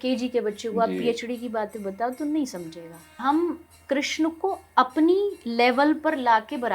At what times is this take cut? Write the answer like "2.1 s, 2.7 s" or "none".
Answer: 3.2 s

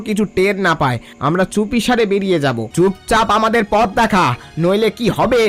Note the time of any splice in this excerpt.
2.7 s

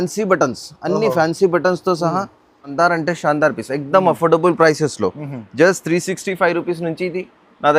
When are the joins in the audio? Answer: 2.7 s

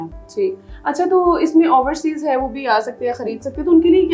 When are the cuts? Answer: none

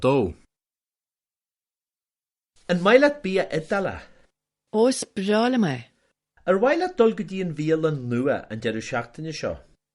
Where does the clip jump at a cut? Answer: 5.2 s

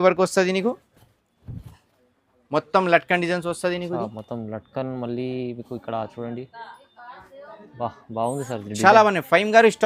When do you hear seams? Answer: none

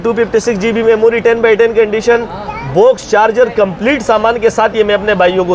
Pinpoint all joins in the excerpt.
none

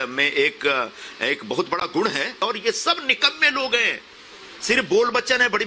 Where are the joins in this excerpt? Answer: 2.4 s

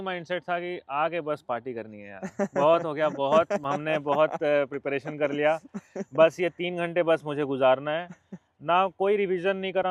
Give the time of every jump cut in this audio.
none

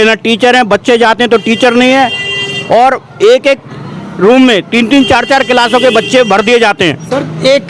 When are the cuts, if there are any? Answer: none

